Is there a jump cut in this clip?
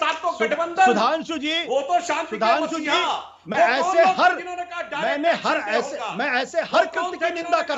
no; 0 cuts

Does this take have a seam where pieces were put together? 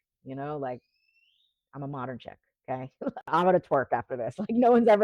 yes; 1 cut; at 3.3 s

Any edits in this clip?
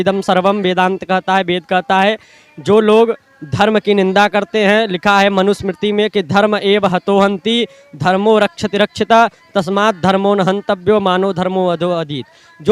no; 0 cuts

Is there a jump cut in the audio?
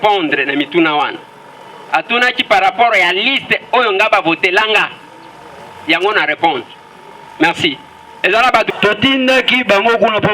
yes; 1 cut; at 8.7 s

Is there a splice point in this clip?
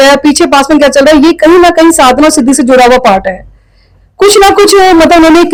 no; 0 cuts

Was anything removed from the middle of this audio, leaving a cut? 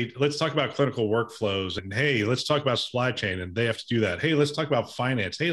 yes; 1 cut; at 1.8 s

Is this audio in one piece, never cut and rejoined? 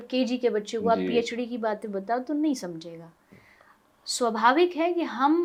yes; 0 cuts

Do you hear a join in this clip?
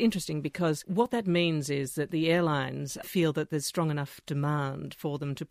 no; 0 cuts

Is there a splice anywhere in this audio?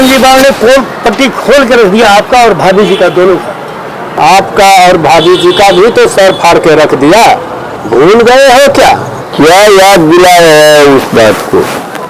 no; 0 cuts

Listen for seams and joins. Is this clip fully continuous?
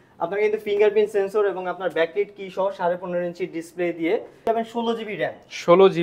no; 1 cut; at 4.5 s

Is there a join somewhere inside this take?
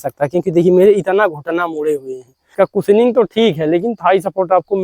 yes; 1 cut; at 2.5 s

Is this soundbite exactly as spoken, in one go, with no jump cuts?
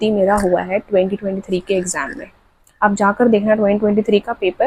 yes; 0 cuts

